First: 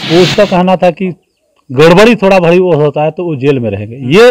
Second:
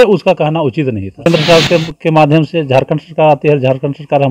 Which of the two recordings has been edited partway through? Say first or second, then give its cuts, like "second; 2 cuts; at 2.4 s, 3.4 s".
second; 1 cut; at 1.3 s